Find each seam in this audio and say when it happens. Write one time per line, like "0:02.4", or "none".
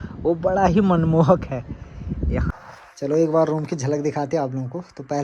0:02.5